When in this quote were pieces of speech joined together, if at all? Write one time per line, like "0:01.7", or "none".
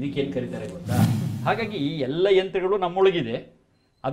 0:01.2